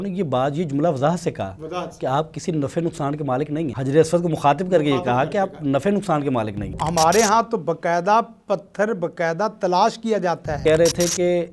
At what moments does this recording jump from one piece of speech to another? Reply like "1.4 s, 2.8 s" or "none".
3.7 s, 6.8 s, 10.5 s